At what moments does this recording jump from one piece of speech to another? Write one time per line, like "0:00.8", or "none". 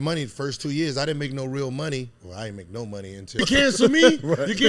0:03.4